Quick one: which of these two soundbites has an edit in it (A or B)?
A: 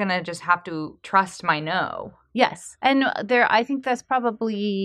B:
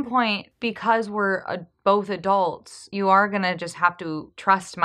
A